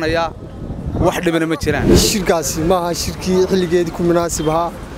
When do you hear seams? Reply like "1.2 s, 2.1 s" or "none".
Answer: 1.9 s